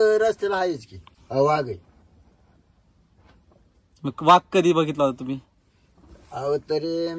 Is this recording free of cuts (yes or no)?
no